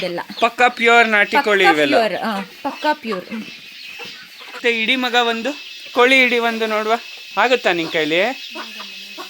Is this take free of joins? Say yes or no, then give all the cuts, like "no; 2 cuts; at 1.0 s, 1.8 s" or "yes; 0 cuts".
no; 2 cuts; at 4.6 s, 7.2 s